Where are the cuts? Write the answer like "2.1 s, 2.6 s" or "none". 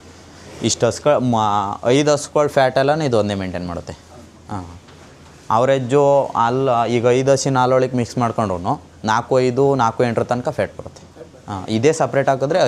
none